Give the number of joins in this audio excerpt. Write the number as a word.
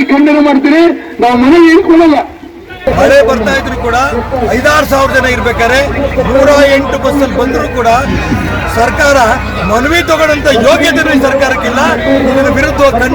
one